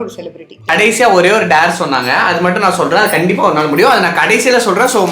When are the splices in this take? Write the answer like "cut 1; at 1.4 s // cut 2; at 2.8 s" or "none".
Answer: cut 1; at 0.7 s // cut 2; at 2.2 s